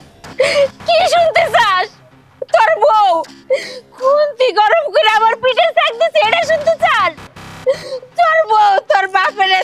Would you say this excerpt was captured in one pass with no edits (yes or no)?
yes